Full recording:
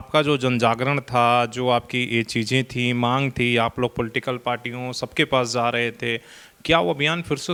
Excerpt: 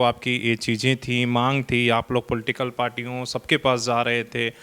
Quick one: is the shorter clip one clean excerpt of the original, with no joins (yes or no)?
yes